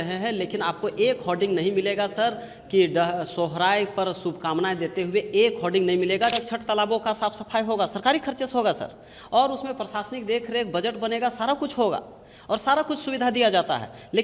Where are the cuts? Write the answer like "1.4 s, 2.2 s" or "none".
6.3 s